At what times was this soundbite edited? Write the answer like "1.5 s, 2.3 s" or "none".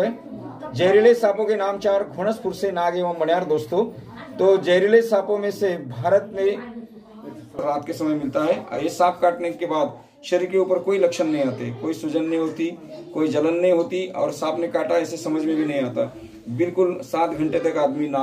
7.6 s